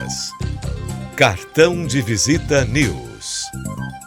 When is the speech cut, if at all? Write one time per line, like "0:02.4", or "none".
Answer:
none